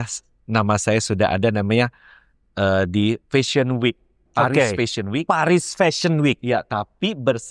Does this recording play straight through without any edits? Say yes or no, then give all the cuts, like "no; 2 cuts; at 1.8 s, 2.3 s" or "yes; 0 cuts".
yes; 0 cuts